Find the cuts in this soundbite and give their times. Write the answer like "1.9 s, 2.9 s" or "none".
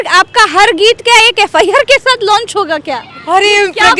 none